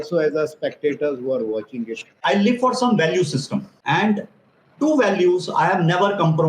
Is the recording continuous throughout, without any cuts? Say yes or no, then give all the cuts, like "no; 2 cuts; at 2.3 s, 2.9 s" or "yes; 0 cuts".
no; 2 cuts; at 2.0 s, 3.7 s